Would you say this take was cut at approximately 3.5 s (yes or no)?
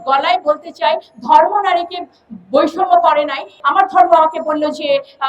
yes